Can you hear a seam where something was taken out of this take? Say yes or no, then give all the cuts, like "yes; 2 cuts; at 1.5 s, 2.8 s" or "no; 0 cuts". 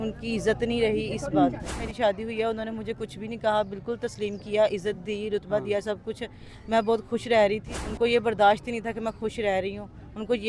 yes; 2 cuts; at 1.8 s, 7.8 s